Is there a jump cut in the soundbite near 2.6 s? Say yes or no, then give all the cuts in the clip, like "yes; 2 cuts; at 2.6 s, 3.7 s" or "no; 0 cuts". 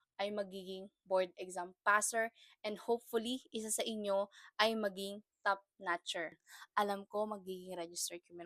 no; 1 cut; at 6.4 s